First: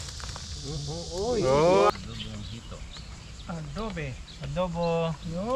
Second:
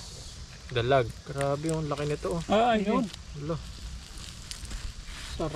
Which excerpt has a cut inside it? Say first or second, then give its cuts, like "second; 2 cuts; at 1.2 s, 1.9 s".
first; 1 cut; at 1.9 s